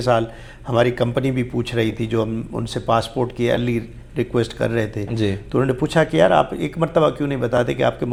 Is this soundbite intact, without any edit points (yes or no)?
yes